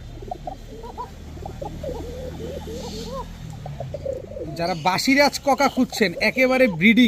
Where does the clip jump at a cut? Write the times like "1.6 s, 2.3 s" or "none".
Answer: none